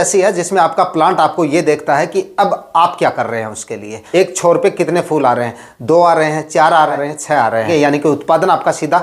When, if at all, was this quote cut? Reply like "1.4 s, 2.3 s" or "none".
4.0 s, 7.1 s